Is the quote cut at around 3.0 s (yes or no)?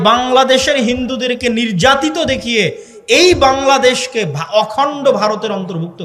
no